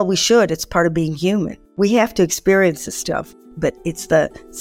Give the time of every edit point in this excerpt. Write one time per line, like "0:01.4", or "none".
0:01.6
0:03.3